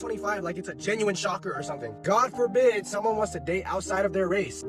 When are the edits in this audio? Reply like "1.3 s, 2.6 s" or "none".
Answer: none